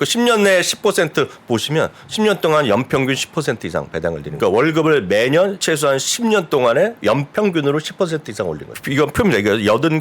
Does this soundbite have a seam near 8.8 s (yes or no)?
yes